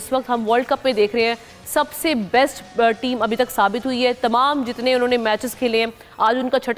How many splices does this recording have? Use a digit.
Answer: 0